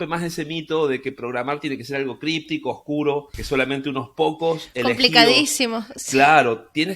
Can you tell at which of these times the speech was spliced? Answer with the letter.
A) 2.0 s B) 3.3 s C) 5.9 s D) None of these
B